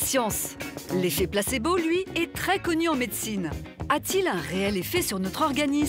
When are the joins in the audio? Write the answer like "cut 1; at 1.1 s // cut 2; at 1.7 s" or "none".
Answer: none

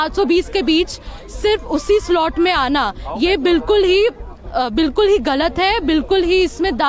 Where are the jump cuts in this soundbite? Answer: none

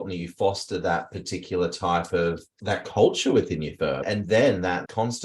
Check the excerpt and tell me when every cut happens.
cut 1; at 2.5 s // cut 2; at 4.0 s

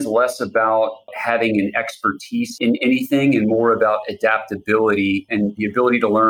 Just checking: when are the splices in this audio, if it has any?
cut 1; at 1.2 s // cut 2; at 2.5 s

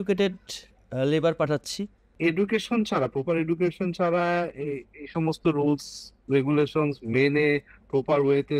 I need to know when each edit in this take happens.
cut 1; at 2.1 s

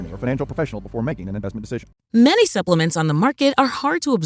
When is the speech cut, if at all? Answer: cut 1; at 1.9 s

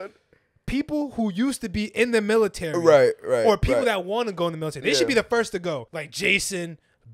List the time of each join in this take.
cut 1; at 5.9 s

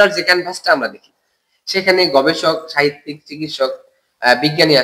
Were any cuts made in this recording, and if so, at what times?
none

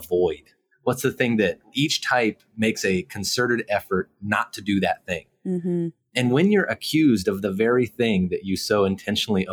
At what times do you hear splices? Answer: none

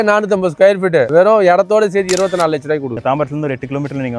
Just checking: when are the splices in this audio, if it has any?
cut 1; at 2.9 s

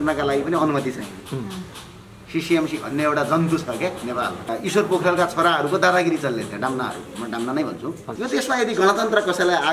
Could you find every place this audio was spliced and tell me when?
cut 1; at 4.4 s // cut 2; at 8.1 s

